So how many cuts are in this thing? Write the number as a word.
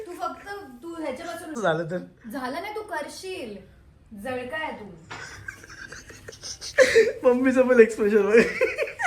two